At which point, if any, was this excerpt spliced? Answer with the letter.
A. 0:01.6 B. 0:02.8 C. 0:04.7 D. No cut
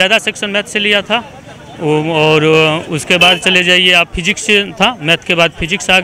D